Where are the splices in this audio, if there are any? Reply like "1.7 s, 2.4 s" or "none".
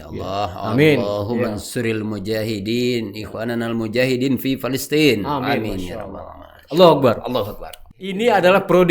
7.7 s